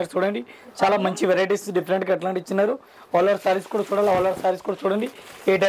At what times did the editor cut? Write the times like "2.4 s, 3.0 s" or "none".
none